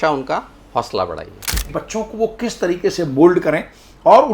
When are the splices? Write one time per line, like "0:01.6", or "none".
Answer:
0:01.6